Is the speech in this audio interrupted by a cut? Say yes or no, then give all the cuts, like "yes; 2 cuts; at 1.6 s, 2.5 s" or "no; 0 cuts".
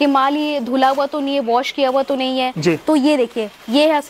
no; 0 cuts